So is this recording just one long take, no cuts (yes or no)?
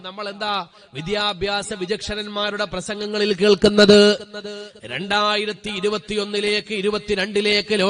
yes